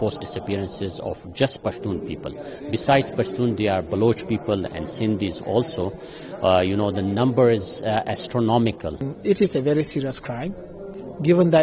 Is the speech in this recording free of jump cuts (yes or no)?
no